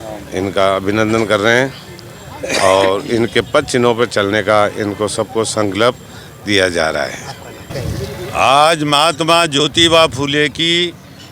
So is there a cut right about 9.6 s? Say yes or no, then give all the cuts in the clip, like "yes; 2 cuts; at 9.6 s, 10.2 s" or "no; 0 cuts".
no; 1 cut; at 7.7 s